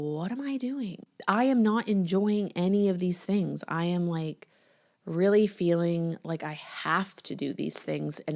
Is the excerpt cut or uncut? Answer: cut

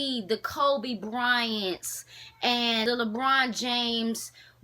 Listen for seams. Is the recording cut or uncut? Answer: cut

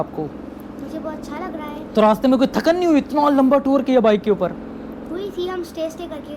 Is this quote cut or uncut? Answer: uncut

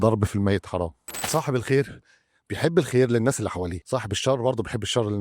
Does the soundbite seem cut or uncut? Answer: cut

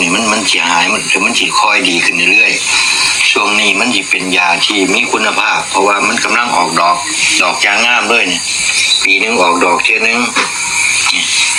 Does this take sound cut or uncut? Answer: uncut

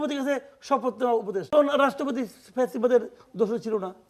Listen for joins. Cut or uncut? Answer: cut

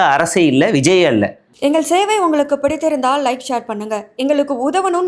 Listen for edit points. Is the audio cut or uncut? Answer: cut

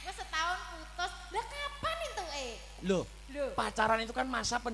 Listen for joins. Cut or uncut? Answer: uncut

